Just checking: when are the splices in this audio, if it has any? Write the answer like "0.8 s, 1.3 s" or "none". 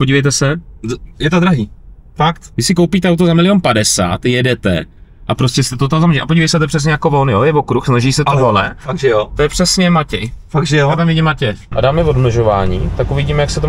2.5 s, 11.6 s